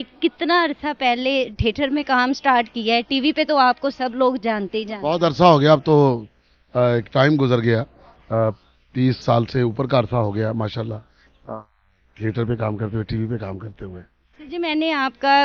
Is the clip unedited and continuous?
yes; 0 cuts

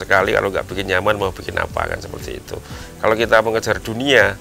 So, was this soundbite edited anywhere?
no; 0 cuts

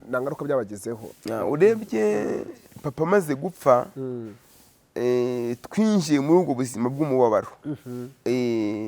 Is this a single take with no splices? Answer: yes; 0 cuts

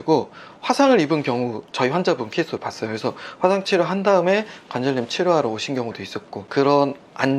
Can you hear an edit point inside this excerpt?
yes; 1 cut; at 6.4 s

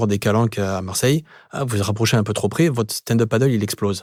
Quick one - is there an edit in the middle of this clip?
no; 0 cuts

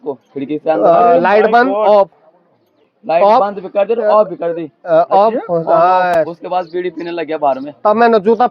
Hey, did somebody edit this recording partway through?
no; 0 cuts

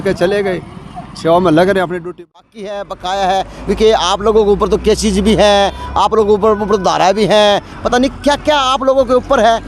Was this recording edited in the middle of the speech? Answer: yes; 1 cut; at 2.0 s

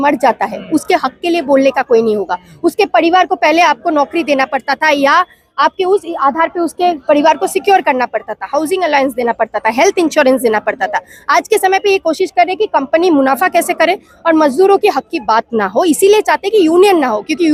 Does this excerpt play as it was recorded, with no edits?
yes; 0 cuts

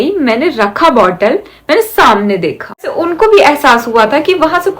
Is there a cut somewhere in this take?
yes; 1 cut; at 2.9 s

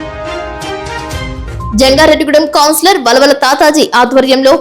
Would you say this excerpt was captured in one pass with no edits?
yes; 0 cuts

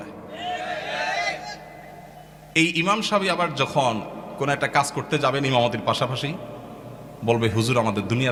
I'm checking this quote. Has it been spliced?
no; 0 cuts

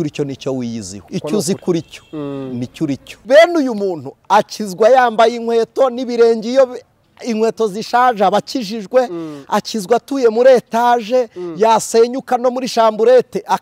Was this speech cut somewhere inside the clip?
yes; 2 cuts; at 0.9 s, 3.1 s

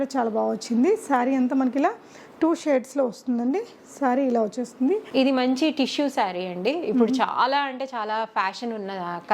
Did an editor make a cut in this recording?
yes; 1 cut; at 5.1 s

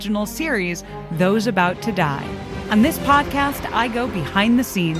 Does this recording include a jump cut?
yes; 1 cut; at 2.5 s

